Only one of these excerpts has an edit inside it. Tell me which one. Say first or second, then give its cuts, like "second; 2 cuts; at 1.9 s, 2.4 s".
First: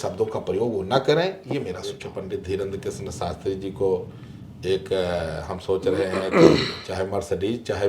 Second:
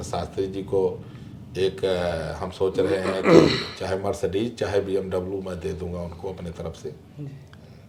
first; 1 cut; at 2.1 s